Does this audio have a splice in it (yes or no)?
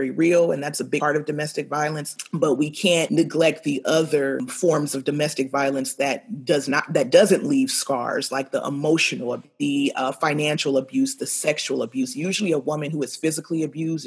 yes